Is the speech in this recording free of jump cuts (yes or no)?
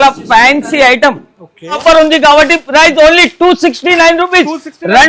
no